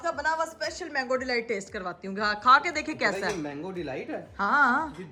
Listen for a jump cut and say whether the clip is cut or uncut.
uncut